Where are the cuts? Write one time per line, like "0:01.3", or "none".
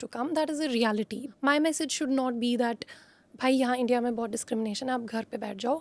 0:01.2